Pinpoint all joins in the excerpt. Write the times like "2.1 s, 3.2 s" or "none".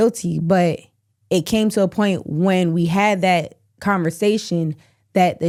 none